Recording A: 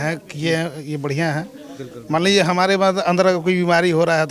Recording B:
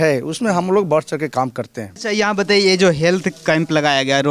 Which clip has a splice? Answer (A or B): B